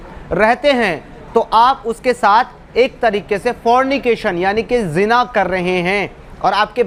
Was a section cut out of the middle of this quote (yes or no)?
no